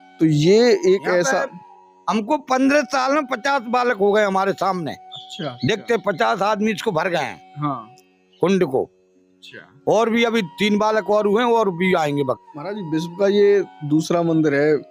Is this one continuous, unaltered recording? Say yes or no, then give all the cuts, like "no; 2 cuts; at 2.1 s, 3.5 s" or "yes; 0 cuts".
no; 1 cut; at 12.5 s